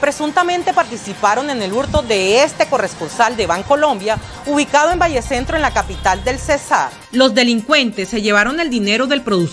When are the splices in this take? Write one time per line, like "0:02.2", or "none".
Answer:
0:07.0